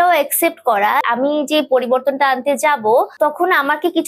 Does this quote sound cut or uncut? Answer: cut